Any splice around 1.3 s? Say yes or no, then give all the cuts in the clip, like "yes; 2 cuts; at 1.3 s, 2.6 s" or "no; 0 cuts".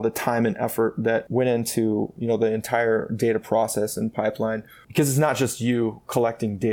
yes; 2 cuts; at 1.3 s, 4.8 s